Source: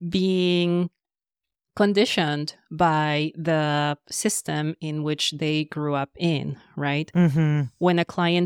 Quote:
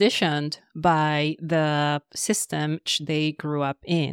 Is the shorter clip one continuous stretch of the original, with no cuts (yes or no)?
no